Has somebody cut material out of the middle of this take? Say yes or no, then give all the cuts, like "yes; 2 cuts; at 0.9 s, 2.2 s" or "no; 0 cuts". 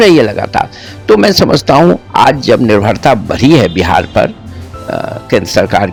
no; 0 cuts